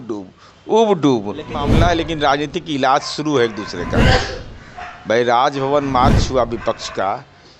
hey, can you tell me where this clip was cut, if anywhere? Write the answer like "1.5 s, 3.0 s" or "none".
1.6 s